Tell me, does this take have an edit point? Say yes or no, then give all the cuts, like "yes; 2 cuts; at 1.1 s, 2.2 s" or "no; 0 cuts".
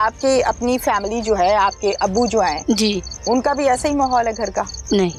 no; 0 cuts